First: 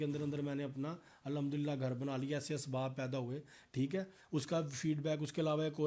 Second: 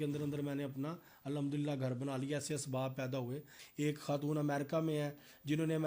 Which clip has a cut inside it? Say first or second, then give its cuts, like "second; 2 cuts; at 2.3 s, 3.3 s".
second; 1 cut; at 3.6 s